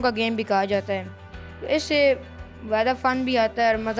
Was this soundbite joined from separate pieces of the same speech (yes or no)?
no